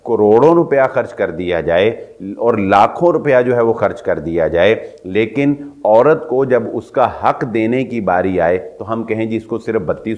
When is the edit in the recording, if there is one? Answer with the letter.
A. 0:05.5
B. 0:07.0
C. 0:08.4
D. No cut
D